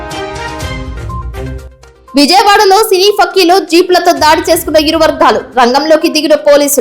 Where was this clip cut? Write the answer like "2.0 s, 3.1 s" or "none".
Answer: 1.4 s